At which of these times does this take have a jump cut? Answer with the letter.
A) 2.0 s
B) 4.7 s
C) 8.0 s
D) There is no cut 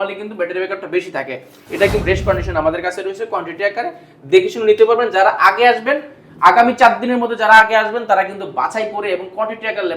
A